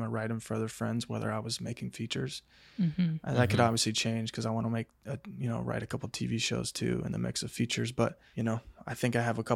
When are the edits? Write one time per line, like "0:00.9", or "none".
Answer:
0:08.2